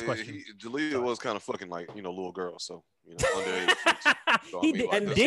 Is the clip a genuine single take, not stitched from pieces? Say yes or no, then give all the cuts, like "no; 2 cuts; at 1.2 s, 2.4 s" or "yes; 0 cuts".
yes; 0 cuts